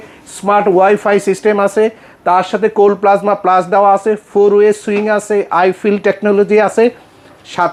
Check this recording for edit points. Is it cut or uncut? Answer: uncut